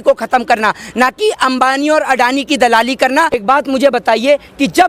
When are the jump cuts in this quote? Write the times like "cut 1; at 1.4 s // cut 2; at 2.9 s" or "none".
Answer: cut 1; at 3.4 s